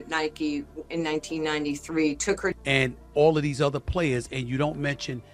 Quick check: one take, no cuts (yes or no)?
yes